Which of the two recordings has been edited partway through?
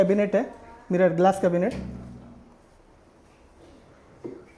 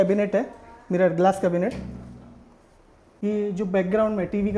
second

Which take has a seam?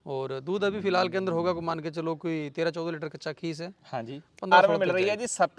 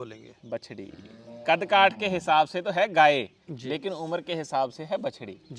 first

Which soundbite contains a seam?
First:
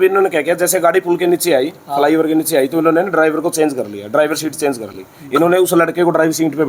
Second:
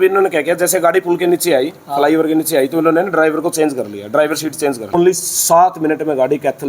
second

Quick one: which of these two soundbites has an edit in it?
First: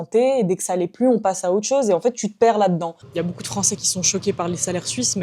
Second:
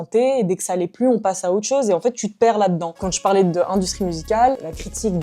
first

